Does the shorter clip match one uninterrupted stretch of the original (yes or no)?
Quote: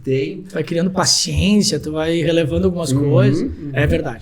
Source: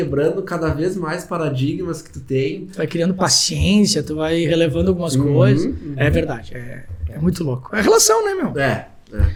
yes